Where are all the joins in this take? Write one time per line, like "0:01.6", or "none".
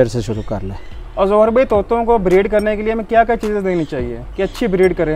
none